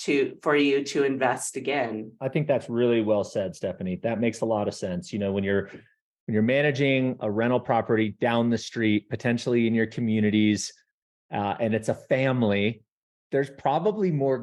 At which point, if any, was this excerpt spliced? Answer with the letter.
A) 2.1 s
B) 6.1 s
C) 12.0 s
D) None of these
A